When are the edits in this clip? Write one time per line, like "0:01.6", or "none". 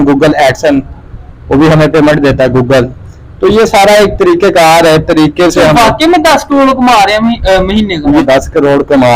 0:08.2